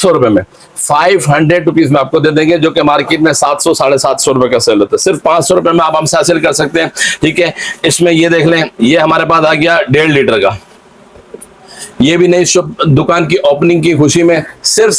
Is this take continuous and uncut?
yes; 0 cuts

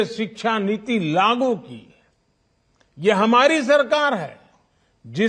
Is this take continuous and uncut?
yes; 0 cuts

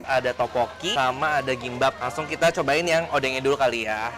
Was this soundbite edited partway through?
yes; 2 cuts; at 1.0 s, 2.0 s

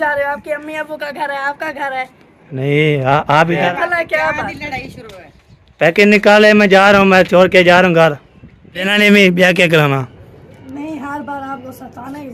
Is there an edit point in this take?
yes; 2 cuts; at 3.7 s, 8.9 s

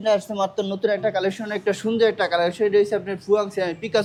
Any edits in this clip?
no; 0 cuts

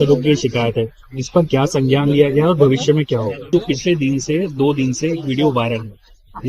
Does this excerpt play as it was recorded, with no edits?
no; 1 cut; at 3.5 s

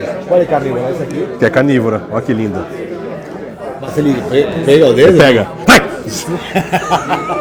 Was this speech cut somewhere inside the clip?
no; 0 cuts

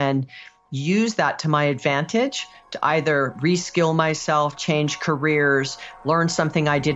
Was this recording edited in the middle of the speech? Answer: no; 0 cuts

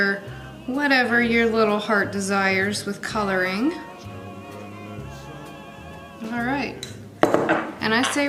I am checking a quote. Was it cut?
no; 0 cuts

